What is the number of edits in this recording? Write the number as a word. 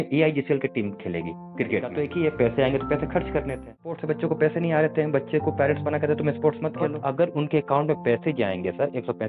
three